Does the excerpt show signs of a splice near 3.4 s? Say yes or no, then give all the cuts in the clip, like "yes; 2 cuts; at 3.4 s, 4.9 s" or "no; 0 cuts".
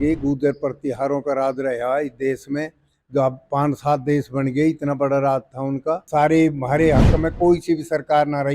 no; 1 cut; at 6.0 s